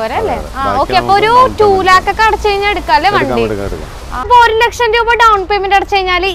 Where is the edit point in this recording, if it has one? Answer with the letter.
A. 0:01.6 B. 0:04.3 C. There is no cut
B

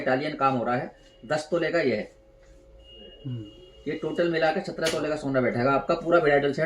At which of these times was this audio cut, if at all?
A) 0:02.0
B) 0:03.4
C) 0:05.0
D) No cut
D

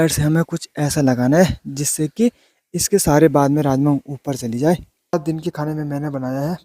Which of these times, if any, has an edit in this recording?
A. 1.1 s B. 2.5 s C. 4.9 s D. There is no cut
C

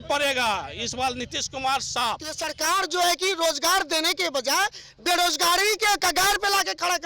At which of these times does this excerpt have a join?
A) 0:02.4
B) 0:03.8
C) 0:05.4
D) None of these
A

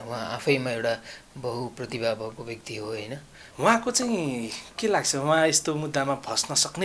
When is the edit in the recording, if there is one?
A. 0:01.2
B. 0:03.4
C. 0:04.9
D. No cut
B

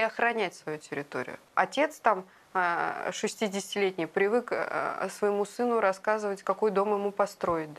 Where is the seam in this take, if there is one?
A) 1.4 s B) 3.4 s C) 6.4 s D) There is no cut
A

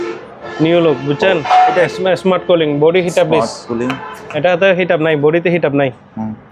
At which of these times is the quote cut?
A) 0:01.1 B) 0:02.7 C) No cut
C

